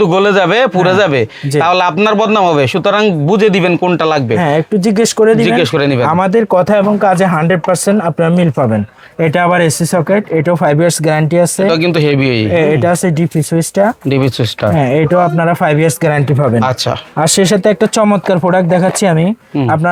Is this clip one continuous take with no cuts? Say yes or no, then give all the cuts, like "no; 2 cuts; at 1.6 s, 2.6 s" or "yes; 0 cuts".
yes; 0 cuts